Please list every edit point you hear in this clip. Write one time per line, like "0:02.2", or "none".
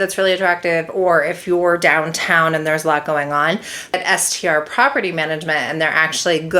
0:03.9